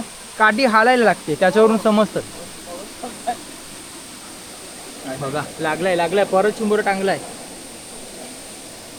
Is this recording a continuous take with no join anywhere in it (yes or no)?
yes